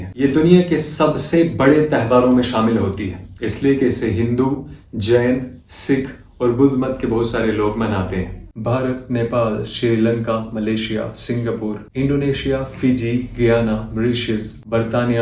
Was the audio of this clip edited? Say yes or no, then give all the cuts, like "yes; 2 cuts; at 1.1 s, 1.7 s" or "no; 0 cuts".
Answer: no; 0 cuts